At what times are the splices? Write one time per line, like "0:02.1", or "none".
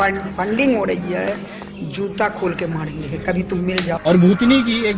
0:03.9

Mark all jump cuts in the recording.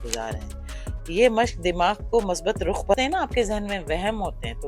0:02.9

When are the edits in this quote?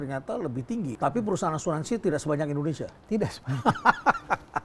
0:00.9

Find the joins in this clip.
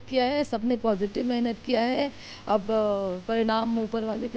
none

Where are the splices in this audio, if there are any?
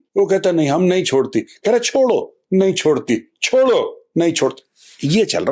none

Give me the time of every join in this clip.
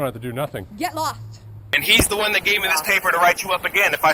0:01.7

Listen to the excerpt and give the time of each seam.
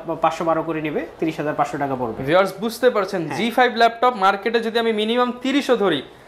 none

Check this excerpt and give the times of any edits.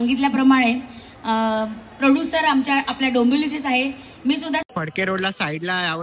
0:04.6

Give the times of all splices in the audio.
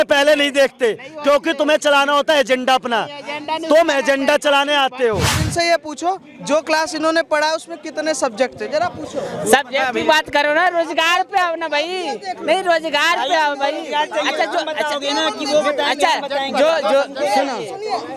0:05.4

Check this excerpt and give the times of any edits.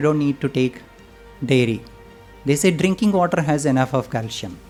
none

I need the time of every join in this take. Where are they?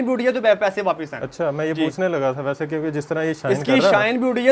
none

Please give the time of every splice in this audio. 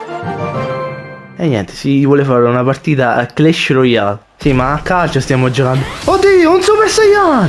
0:04.2

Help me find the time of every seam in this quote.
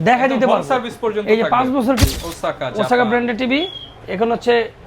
0:02.0

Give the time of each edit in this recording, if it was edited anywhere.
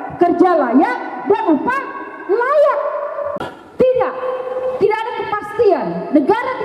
0:03.3

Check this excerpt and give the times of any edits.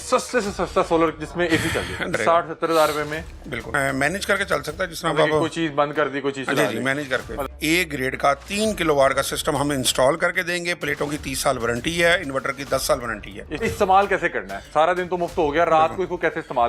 0:02.1
0:03.6
0:07.4
0:13.5

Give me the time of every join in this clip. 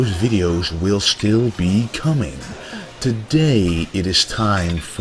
0:03.8

